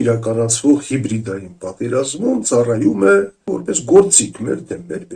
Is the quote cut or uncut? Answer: cut